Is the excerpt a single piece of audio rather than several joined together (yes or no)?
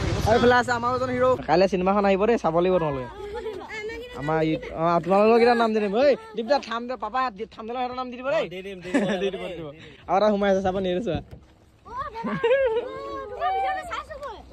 no